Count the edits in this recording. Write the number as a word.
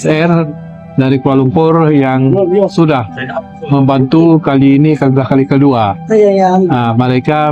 zero